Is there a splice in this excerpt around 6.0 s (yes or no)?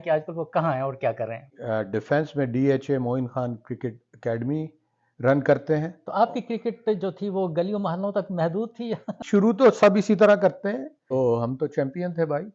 yes